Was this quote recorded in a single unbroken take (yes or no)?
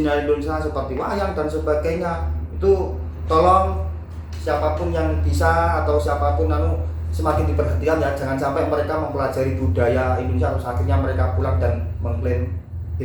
yes